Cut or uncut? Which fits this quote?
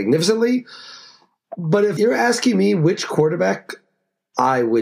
cut